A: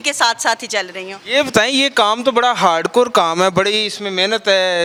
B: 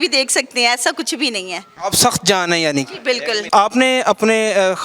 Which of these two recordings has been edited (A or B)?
B